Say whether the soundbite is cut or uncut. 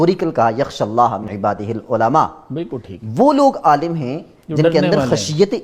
cut